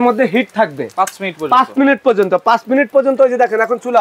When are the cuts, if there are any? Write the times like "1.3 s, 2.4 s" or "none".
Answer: none